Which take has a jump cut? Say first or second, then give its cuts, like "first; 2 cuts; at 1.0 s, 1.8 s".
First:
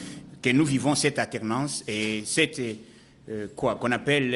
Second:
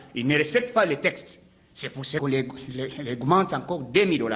second; 1 cut; at 2.2 s